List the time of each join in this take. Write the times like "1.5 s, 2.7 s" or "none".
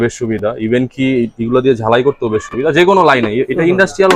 none

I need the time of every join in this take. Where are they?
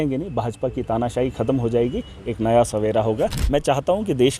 3.4 s

